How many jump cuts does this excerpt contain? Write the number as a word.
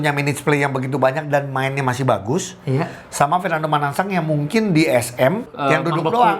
one